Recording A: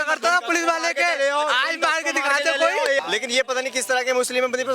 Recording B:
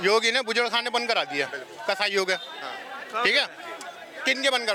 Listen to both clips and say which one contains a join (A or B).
A